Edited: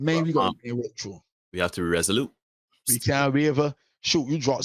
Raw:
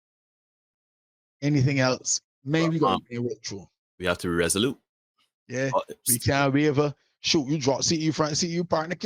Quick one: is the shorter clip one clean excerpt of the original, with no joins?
no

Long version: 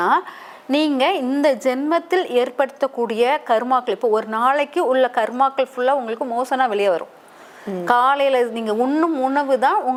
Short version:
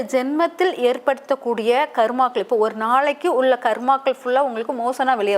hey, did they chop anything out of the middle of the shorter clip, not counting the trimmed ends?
no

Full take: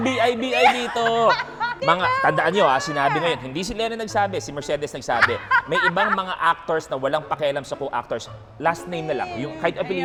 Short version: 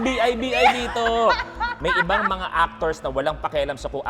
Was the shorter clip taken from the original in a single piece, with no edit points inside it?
no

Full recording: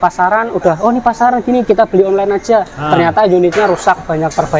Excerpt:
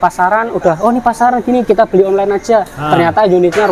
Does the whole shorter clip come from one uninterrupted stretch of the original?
yes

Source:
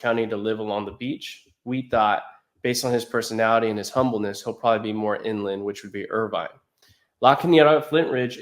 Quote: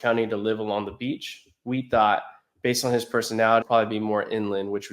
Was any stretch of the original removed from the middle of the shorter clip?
yes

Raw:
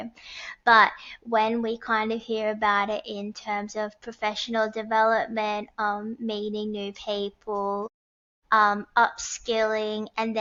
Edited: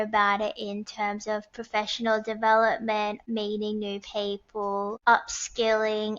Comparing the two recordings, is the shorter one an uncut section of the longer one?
no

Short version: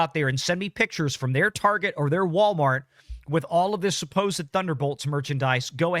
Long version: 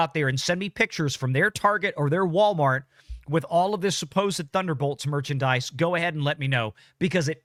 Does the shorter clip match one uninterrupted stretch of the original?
yes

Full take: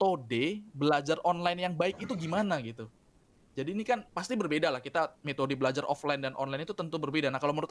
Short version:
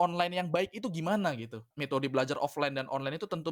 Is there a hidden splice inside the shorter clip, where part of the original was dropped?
yes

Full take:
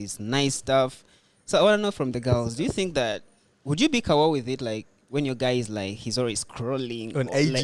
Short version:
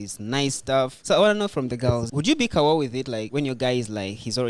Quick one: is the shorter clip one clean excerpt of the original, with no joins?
no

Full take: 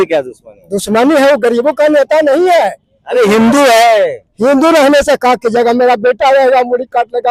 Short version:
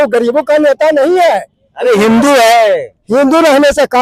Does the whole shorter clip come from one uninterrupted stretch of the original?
yes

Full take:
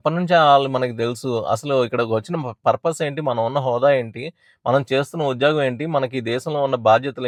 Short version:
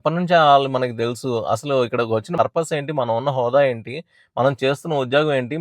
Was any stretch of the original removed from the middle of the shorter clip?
yes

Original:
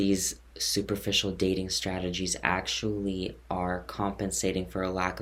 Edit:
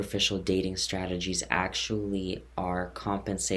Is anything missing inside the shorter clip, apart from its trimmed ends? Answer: no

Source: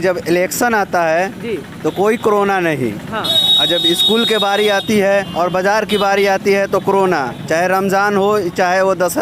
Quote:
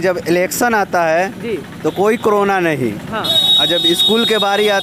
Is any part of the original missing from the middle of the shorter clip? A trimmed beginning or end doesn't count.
no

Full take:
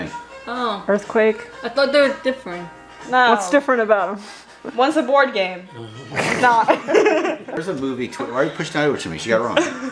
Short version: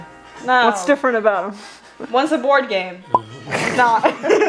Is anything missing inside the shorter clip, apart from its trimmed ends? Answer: no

